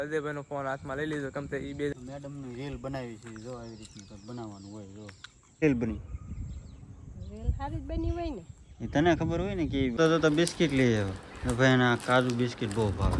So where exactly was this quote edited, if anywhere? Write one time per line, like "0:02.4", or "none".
0:01.9
0:05.6
0:10.0